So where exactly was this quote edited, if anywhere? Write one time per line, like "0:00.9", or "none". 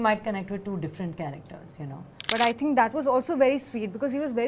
0:02.1